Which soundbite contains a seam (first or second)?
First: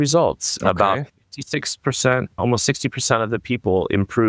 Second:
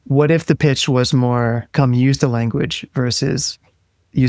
second